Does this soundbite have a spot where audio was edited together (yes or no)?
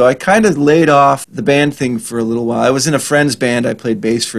yes